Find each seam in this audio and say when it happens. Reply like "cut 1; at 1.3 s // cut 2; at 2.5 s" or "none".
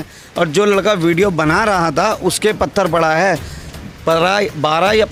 none